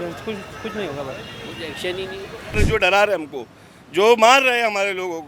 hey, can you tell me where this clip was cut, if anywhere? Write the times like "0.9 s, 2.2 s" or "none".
2.5 s